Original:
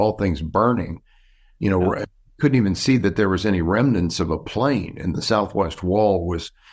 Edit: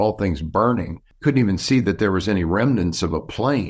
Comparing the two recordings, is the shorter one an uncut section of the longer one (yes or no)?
no